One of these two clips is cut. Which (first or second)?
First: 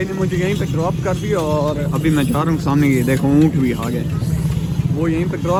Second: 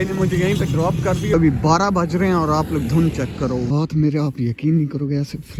second